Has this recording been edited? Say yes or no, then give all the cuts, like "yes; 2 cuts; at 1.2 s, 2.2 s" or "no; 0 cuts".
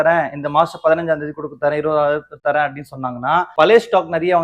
yes; 1 cut; at 3.5 s